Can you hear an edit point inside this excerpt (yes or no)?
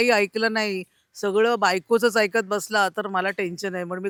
no